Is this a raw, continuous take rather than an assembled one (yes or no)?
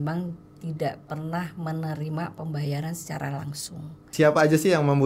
no